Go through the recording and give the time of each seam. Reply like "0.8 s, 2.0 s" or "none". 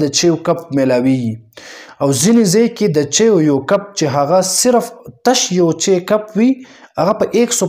none